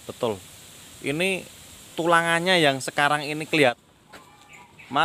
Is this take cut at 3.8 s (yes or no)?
yes